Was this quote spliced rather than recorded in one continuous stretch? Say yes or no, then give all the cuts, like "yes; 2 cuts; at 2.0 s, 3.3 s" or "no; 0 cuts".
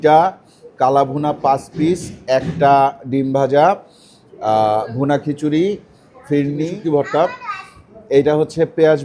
yes; 1 cut; at 6.7 s